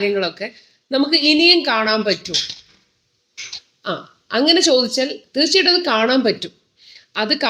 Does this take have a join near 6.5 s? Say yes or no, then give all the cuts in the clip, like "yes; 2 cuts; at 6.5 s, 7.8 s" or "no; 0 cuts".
no; 0 cuts